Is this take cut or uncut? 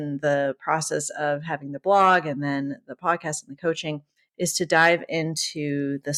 uncut